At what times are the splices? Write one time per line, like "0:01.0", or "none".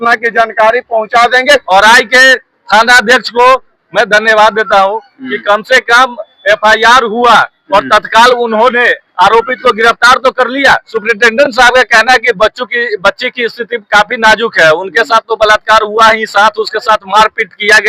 0:01.6
0:10.9